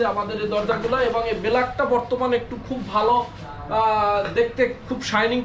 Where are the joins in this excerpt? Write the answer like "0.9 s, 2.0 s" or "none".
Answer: none